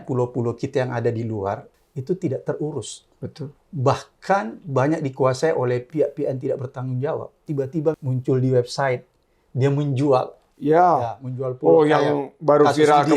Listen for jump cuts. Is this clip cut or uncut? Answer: cut